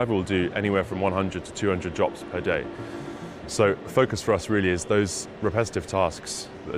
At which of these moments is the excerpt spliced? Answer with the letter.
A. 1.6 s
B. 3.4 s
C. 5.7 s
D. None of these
D